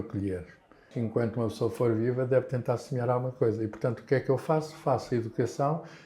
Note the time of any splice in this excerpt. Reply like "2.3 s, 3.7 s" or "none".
0.9 s